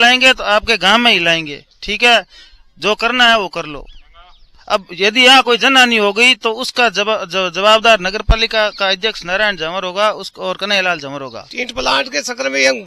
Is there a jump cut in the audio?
yes; 1 cut; at 11.4 s

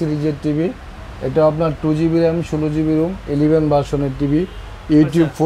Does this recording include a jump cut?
no; 0 cuts

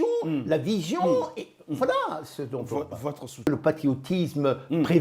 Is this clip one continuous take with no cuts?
no; 1 cut; at 3.5 s

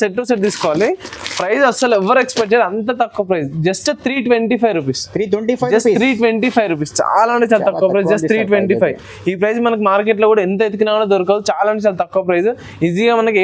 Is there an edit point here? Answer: no; 0 cuts

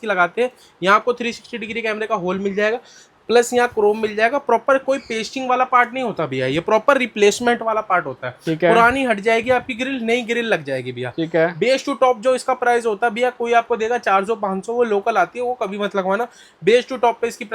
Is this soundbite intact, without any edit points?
yes; 0 cuts

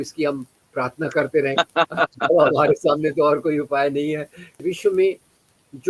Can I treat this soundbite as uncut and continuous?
no; 1 cut; at 4.6 s

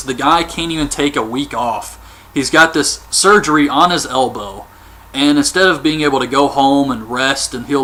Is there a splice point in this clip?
no; 0 cuts

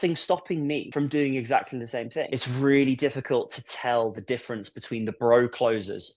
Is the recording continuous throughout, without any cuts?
no; 1 cut; at 2.3 s

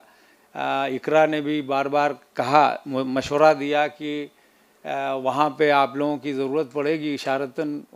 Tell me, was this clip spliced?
no; 0 cuts

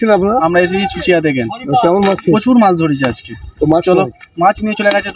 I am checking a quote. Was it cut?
no; 0 cuts

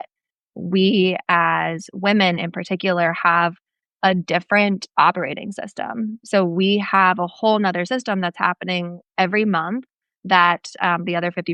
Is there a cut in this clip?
no; 0 cuts

